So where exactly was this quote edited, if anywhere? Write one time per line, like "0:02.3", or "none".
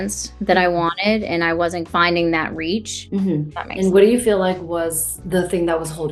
0:03.0